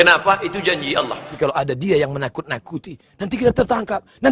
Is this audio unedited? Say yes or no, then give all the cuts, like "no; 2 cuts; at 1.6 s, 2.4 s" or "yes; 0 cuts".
no; 1 cut; at 1.3 s